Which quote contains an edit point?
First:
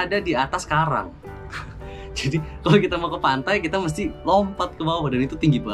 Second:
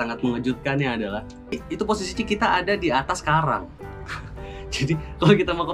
second; 1 cut; at 1.6 s

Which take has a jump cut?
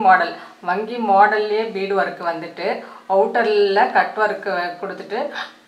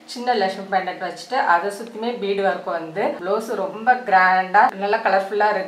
second; 2 cuts; at 3.2 s, 4.8 s

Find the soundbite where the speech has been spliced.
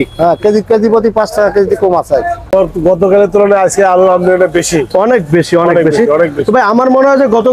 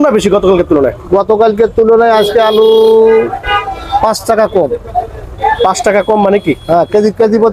first; 1 cut; at 2.4 s

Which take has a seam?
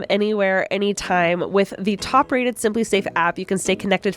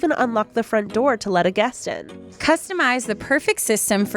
second; 1 cut; at 2.3 s

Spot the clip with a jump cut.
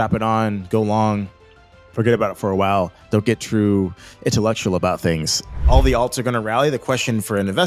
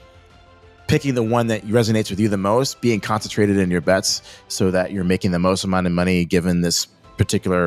first; 1 cut; at 5.6 s

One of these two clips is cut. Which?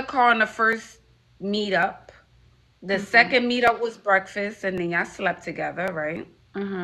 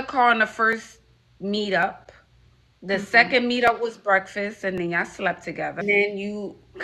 second; 1 cut; at 5.8 s

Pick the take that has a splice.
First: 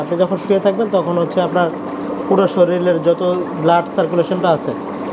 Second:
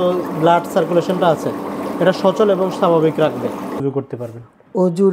second; 1 cut; at 3.8 s

